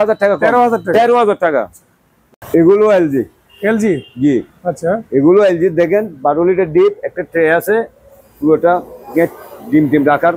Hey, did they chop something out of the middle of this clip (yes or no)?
no